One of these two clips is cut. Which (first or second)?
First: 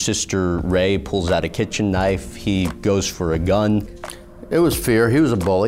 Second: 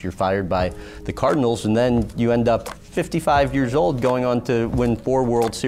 first